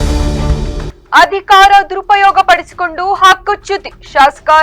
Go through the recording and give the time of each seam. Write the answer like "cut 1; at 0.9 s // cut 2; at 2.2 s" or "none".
cut 1; at 0.9 s